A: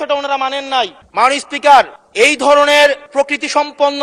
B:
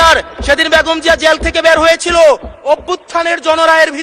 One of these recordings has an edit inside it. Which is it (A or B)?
A